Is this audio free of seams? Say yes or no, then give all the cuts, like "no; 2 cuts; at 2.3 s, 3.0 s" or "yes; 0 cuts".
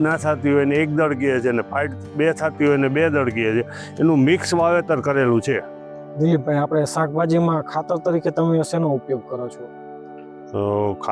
yes; 0 cuts